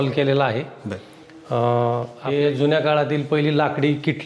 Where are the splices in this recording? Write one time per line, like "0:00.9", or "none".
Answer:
0:02.2